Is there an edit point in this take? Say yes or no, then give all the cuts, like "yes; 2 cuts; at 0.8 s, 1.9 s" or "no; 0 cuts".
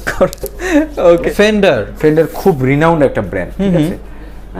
yes; 1 cut; at 1.3 s